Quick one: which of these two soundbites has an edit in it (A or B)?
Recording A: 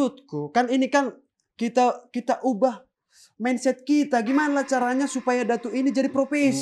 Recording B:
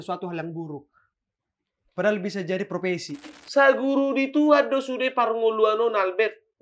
B